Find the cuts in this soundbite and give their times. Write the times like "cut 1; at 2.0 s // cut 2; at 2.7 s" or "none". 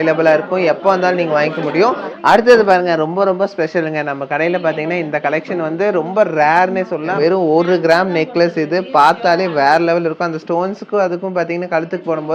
cut 1; at 2.1 s // cut 2; at 7.1 s